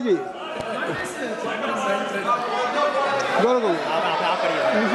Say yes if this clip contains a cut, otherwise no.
no